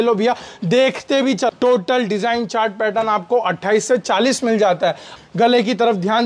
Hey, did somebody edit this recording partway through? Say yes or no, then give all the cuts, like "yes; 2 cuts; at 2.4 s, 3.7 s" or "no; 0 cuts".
yes; 2 cuts; at 1.5 s, 5.1 s